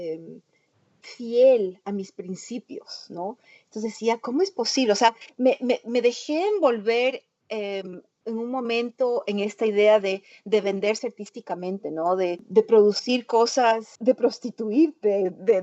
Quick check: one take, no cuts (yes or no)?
no